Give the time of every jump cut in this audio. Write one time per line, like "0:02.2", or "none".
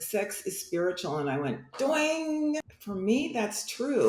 0:02.8